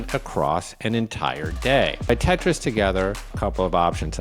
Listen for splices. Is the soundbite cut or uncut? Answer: cut